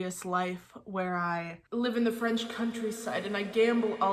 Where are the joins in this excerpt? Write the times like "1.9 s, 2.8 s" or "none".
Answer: none